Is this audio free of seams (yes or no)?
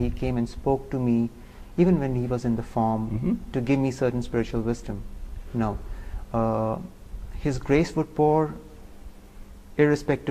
yes